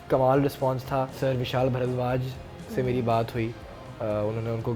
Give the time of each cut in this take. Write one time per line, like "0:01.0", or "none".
0:01.1